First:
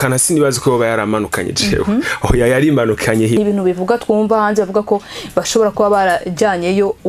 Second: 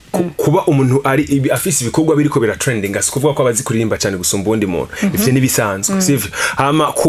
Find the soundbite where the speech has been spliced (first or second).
first